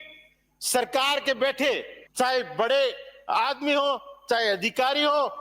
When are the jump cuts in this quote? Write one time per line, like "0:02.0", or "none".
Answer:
0:02.0